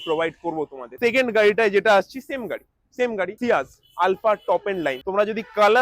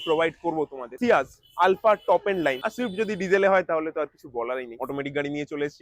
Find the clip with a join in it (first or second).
second